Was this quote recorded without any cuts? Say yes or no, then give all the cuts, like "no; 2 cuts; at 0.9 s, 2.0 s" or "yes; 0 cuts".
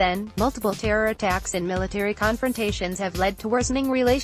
yes; 0 cuts